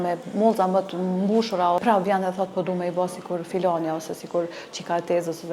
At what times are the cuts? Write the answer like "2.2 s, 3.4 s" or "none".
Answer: 1.8 s